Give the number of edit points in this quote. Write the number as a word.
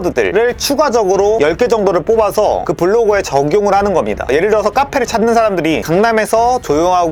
zero